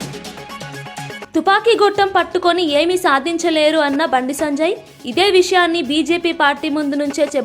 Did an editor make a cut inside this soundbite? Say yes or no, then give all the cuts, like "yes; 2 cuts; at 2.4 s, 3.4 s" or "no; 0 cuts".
yes; 1 cut; at 1.3 s